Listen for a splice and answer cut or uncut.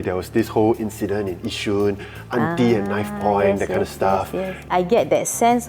cut